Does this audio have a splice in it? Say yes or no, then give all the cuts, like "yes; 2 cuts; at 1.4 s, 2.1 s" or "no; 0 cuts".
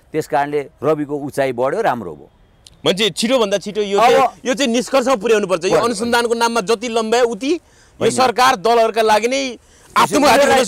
no; 0 cuts